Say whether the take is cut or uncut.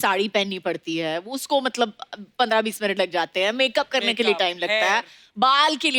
uncut